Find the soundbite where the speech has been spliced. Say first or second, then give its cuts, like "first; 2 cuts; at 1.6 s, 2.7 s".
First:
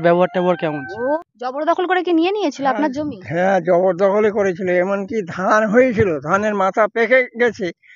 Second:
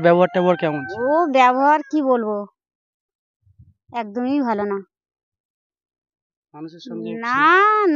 first; 1 cut; at 1.2 s